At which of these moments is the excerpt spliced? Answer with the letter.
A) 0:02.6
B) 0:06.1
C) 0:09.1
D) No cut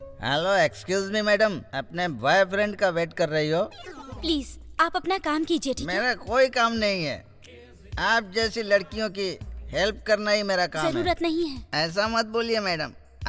D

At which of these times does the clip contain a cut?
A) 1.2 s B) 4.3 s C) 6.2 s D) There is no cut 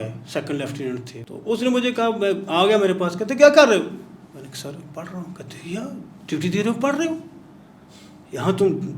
A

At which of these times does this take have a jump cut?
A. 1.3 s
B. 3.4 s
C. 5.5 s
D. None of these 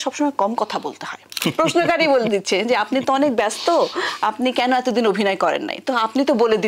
A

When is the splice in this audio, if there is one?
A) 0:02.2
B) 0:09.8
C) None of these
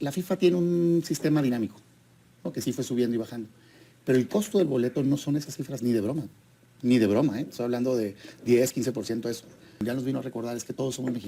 B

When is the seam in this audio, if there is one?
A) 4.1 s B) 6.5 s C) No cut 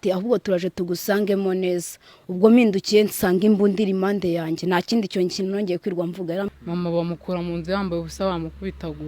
B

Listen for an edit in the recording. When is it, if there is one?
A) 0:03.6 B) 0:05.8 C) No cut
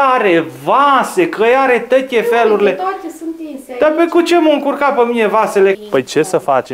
B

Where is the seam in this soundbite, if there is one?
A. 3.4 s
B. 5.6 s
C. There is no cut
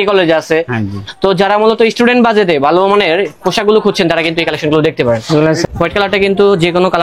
B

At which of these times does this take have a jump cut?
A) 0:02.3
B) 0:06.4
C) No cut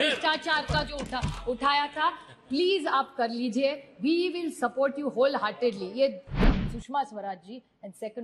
B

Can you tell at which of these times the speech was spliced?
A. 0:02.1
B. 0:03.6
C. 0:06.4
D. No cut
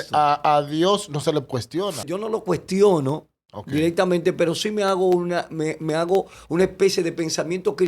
A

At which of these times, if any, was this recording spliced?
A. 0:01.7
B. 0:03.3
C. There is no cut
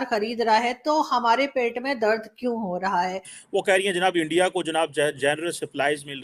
B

